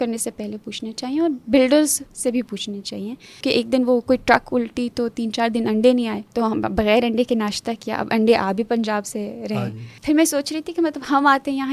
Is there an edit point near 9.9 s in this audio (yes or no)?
yes